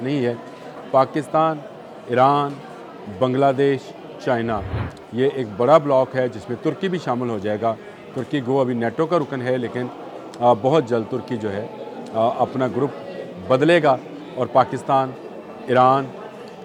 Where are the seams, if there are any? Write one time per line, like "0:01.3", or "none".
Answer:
none